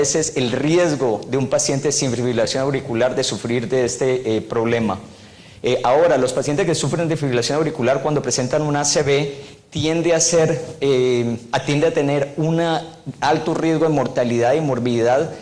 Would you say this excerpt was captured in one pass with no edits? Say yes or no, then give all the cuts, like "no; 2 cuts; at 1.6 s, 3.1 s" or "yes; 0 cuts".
no; 1 cut; at 1.2 s